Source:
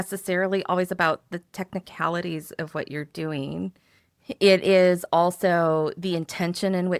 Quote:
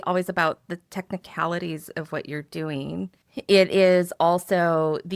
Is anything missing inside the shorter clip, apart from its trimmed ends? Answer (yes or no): yes